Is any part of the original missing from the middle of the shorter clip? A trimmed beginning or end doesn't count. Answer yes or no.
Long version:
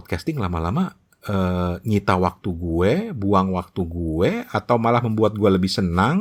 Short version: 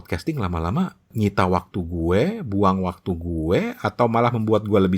yes